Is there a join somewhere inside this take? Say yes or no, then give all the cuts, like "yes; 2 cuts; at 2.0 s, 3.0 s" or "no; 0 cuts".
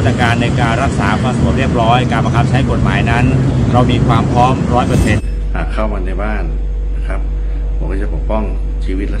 yes; 1 cut; at 5.2 s